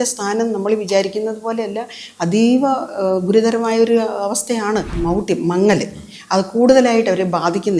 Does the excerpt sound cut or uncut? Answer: cut